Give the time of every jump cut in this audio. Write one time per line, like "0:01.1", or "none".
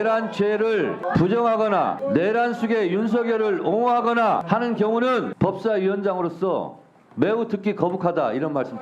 0:01.0
0:02.0
0:04.4
0:05.3